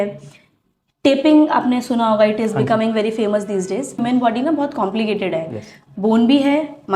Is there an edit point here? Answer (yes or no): yes